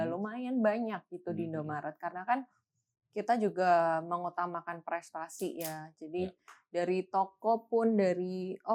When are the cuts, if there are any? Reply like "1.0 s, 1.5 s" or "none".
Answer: none